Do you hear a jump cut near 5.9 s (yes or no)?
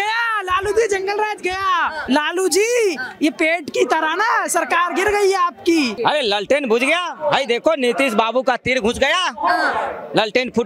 yes